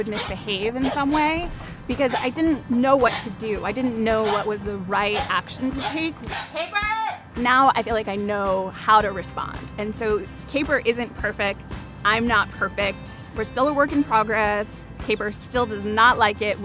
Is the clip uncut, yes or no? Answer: no